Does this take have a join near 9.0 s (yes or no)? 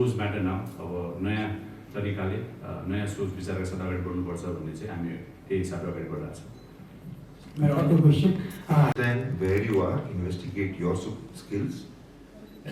no